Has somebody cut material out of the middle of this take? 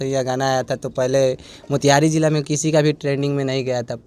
no; 0 cuts

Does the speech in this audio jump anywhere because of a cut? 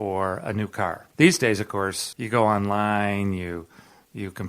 yes; 2 cuts; at 1.0 s, 2.0 s

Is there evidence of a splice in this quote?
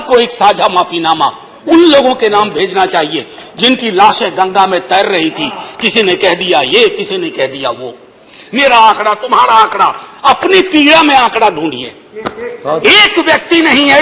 yes; 1 cut; at 8.4 s

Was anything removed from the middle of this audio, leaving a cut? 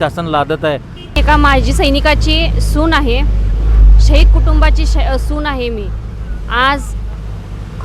yes; 1 cut; at 1.2 s

